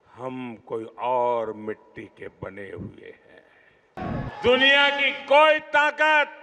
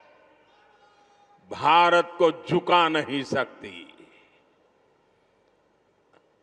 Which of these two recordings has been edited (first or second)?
first